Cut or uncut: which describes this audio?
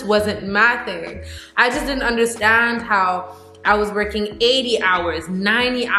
uncut